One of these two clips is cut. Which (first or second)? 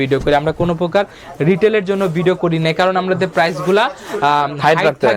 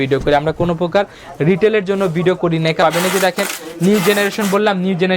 second